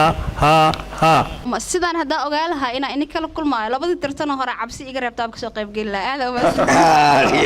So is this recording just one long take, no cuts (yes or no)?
no